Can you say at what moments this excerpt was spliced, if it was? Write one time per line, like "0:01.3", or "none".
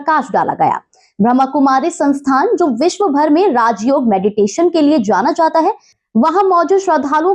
0:06.0